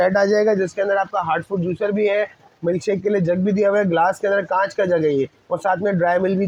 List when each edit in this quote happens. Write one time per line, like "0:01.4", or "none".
none